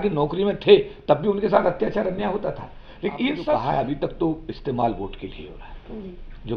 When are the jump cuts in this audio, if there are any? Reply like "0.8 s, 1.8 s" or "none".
3.4 s